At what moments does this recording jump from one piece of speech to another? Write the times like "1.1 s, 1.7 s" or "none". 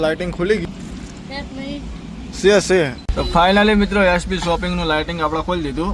3.0 s